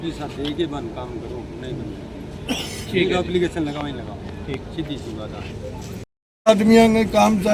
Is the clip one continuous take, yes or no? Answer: yes